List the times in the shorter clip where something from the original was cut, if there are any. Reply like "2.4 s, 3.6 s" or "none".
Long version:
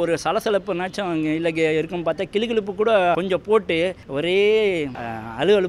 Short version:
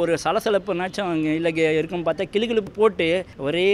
2.7 s